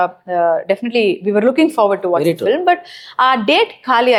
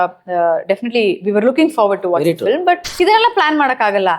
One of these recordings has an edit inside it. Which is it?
second; 1 cut; at 2.9 s

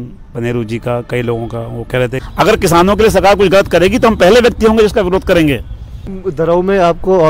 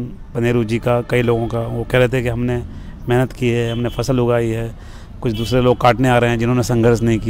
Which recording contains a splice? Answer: first; 2 cuts; at 2.2 s, 6.1 s

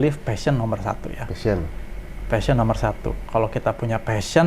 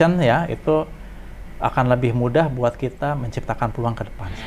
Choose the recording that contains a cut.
first; 1 cut; at 3.2 s

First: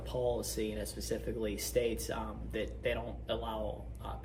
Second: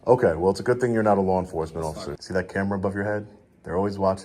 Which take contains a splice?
second; 1 cut; at 2.2 s

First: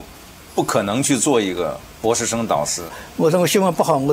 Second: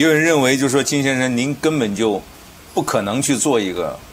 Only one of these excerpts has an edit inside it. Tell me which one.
first; 1 cut; at 2.9 s

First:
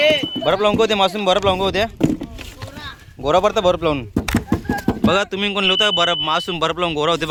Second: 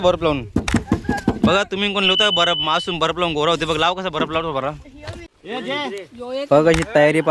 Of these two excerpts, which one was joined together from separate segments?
second; 1 cut; at 5.4 s

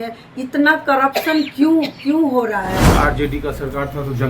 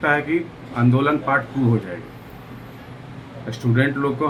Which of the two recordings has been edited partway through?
first; 1 cut; at 2.9 s

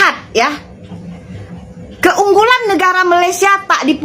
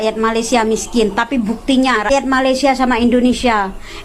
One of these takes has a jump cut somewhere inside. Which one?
second; 1 cut; at 2.1 s

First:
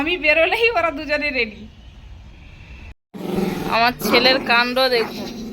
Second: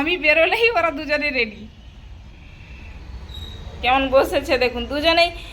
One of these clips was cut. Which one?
first; 1 cut; at 3.4 s

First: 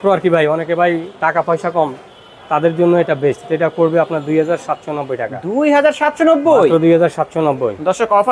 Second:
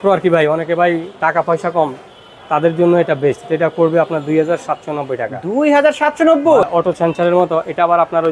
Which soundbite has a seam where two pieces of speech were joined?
second; 1 cut; at 6.6 s

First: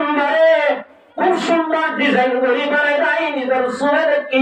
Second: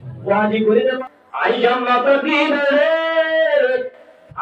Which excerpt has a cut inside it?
second; 1 cut; at 1.0 s

